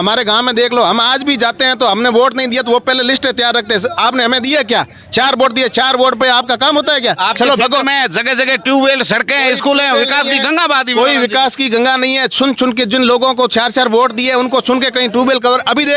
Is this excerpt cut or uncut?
uncut